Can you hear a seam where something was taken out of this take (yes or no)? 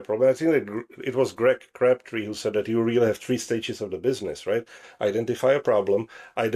no